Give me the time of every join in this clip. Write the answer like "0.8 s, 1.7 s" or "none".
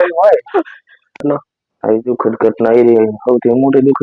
1.2 s